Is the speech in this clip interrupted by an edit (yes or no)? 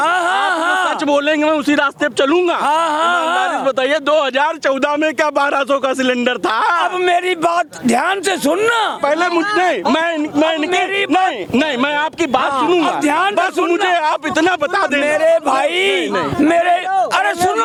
no